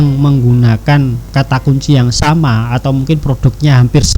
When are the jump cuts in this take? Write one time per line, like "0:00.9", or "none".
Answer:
0:01.2